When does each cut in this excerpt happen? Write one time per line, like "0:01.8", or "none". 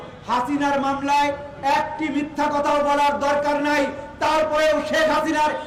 none